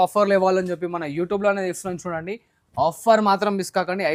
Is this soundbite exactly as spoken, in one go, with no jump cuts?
yes; 0 cuts

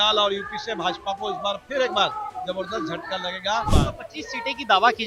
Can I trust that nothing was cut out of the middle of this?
no; 1 cut; at 3.7 s

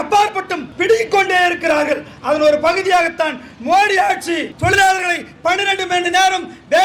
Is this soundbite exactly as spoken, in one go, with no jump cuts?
yes; 0 cuts

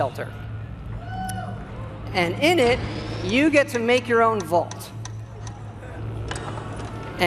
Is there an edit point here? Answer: no; 0 cuts

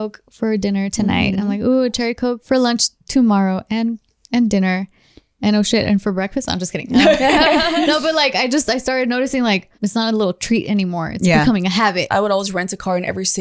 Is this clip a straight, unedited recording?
no; 3 cuts; at 2.4 s, 9.7 s, 12.1 s

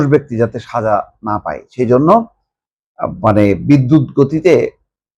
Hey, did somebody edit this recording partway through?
no; 0 cuts

